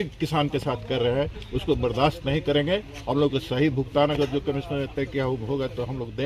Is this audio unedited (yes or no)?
yes